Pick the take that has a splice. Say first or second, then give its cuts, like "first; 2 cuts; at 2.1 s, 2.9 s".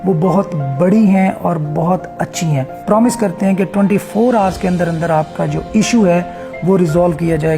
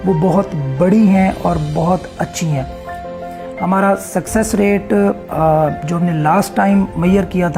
first; 1 cut; at 2.8 s